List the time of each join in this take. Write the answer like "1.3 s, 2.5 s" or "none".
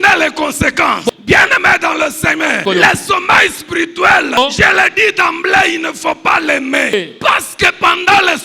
1.1 s, 2.6 s, 4.4 s, 6.9 s